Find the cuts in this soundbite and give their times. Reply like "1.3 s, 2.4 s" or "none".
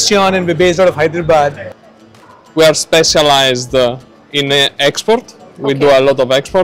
1.7 s